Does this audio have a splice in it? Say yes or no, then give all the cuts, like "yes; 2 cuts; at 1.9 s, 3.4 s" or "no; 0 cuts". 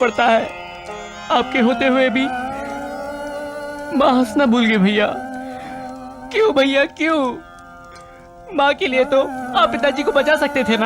no; 0 cuts